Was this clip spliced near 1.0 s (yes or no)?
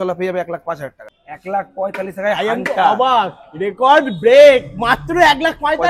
yes